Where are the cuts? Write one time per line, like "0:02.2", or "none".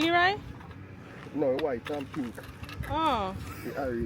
none